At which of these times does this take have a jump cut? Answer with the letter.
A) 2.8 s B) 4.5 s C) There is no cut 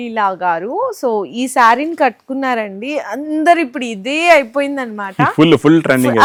C